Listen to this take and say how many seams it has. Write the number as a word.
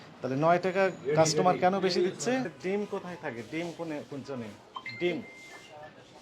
one